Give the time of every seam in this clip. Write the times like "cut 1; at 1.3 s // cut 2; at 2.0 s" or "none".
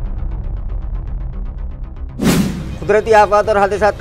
cut 1; at 2.2 s

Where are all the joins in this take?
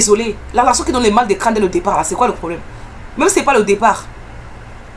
none

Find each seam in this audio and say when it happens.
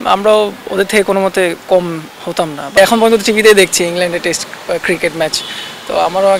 cut 1; at 2.8 s

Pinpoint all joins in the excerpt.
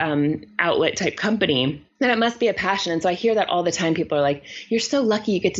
cut 1; at 1.8 s

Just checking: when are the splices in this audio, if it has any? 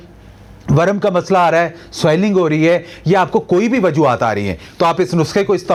none

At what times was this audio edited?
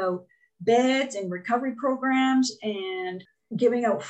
cut 1; at 3.2 s

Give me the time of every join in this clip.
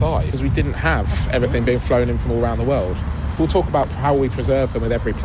cut 1; at 3.3 s

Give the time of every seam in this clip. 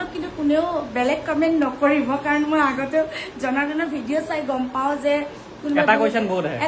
none

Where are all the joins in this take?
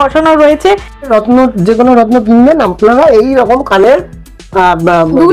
cut 1; at 1.1 s

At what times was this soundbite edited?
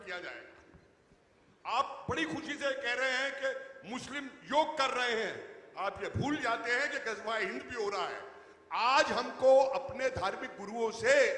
none

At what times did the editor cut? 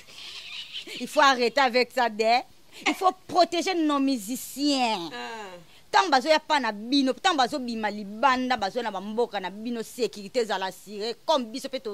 none

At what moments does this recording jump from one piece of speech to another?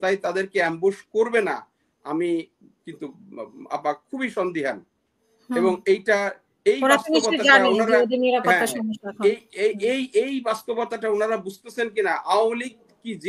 none

